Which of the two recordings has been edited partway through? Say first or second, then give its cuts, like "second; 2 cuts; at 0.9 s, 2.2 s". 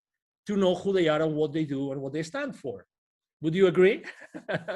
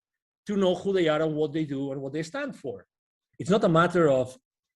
second; 1 cut; at 3.2 s